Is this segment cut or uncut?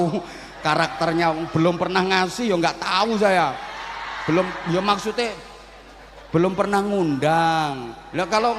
uncut